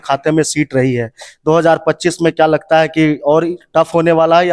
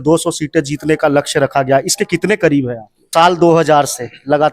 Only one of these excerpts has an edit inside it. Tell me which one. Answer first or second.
second